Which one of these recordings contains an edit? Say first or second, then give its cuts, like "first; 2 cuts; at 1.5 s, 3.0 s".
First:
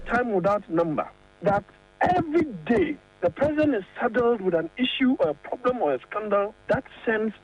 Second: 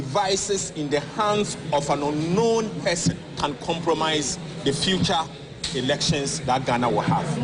second; 2 cuts; at 3.3 s, 4.5 s